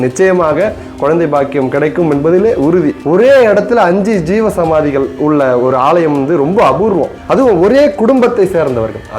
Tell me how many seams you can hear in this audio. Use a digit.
2